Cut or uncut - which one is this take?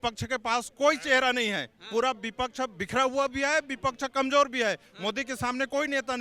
uncut